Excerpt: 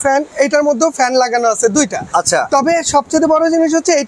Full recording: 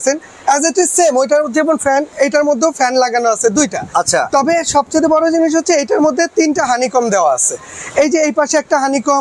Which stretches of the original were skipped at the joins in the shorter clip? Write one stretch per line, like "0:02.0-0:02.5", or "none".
none